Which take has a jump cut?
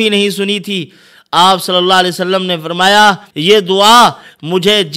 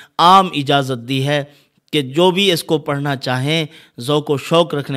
first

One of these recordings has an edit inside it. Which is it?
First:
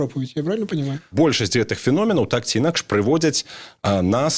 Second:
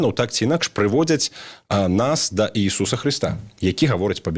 first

